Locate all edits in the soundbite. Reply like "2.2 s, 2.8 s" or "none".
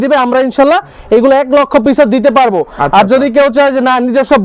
none